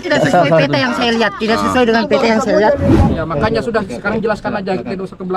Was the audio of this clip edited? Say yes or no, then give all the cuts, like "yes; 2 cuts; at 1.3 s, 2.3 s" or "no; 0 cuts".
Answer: yes; 1 cut; at 3.1 s